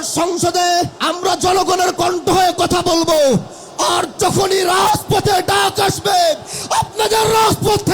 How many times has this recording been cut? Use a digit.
1